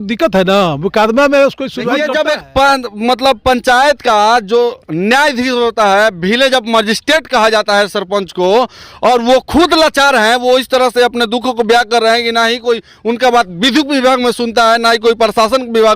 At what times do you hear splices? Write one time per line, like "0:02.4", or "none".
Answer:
0:01.9